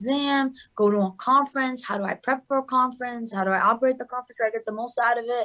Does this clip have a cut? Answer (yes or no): no